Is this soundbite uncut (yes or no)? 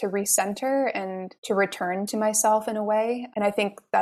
yes